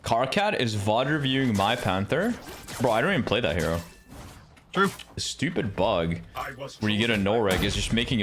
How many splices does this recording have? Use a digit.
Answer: 1